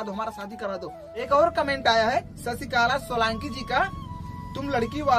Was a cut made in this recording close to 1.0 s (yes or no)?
yes